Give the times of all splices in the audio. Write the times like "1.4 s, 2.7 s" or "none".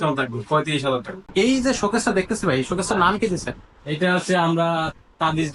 1.2 s